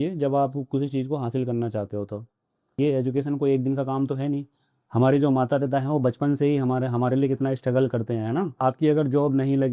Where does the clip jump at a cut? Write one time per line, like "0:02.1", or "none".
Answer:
0:02.7